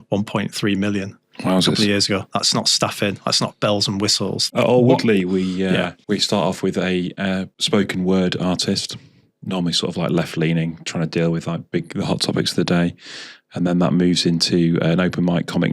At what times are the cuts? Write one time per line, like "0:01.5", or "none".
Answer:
0:04.5
0:06.0
0:07.5

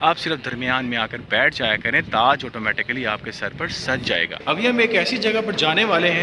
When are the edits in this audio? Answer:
0:04.3

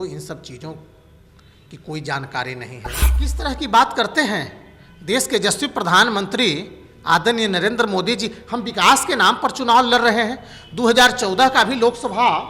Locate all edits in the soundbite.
0:03.3

